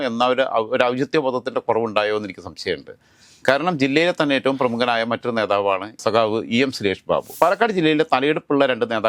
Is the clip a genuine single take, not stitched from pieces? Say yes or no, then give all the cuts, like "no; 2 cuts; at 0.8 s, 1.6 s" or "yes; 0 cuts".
no; 1 cut; at 7.3 s